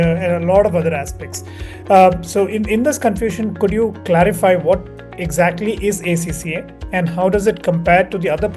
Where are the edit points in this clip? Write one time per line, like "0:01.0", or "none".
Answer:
none